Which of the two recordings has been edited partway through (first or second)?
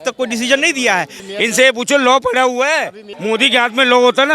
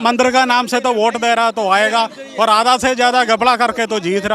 first